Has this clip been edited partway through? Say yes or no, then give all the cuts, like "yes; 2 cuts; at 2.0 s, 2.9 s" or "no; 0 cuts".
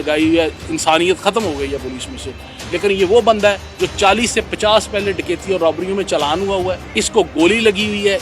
yes; 2 cuts; at 3.7 s, 6.8 s